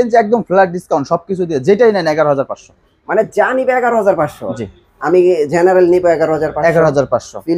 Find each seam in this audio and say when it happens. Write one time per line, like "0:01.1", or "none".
none